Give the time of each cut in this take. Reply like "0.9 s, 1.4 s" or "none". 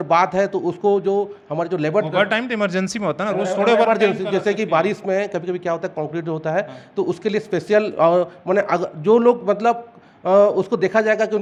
none